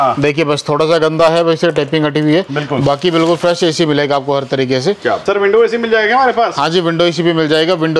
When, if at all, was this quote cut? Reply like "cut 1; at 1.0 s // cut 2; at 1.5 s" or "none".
none